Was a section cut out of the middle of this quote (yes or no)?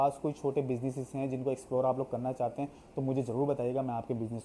no